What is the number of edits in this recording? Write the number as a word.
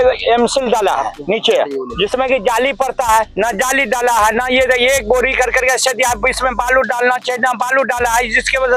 zero